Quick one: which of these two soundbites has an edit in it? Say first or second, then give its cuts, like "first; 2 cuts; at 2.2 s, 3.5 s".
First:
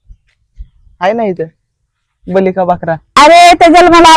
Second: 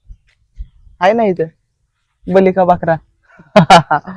first; 1 cut; at 3.2 s